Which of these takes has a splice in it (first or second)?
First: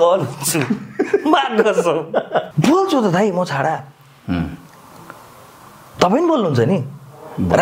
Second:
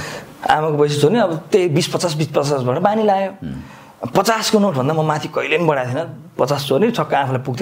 first